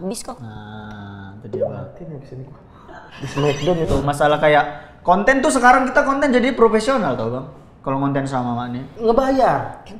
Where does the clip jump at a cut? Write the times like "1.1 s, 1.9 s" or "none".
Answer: 3.9 s